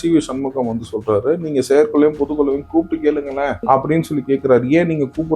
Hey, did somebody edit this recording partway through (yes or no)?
yes